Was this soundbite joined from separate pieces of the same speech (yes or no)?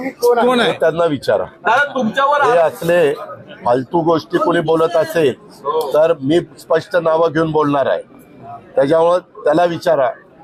no